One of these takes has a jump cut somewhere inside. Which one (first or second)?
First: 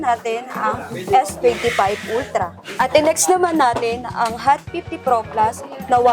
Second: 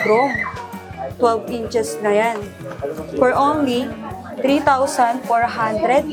first